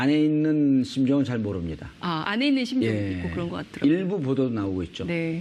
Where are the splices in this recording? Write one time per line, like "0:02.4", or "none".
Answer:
none

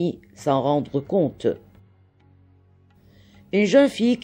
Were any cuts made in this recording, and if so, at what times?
0:01.6
0:03.2

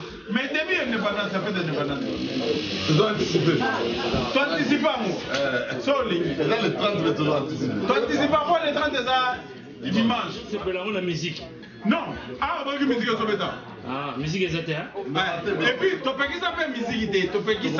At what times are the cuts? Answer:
0:10.5

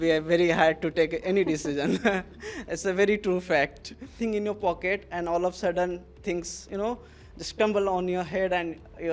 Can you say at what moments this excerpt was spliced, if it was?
0:04.2

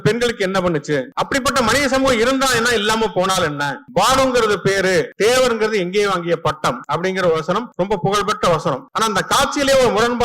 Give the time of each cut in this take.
0:01.1
0:03.7
0:05.1
0:06.8
0:07.7
0:08.9

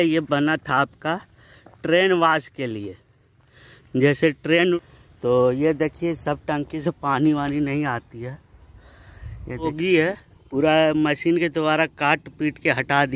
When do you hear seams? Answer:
0:04.8
0:09.7

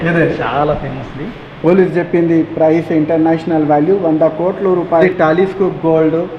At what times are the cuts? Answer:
0:05.0

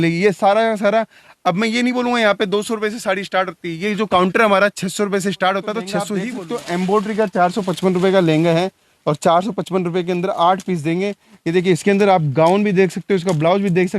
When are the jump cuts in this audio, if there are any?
0:06.2

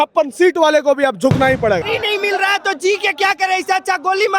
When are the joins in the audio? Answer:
0:01.8

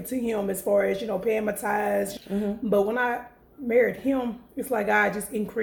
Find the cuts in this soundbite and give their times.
0:02.1

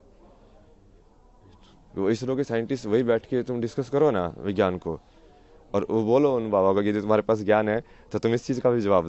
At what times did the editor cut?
none

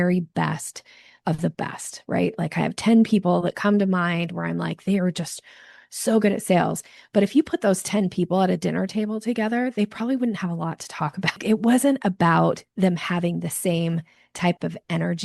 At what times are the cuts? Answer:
0:11.4

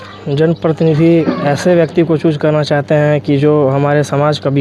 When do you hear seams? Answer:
none

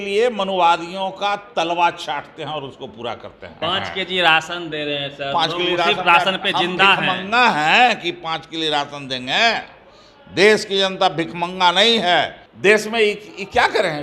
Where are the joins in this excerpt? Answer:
0:03.5
0:12.4

